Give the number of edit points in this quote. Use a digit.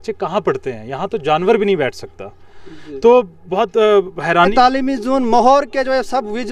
1